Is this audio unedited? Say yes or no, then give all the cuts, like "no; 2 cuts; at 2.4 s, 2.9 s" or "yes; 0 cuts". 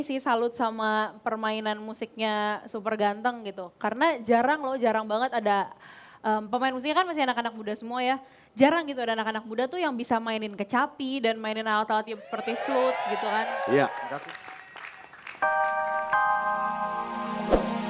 no; 1 cut; at 15.2 s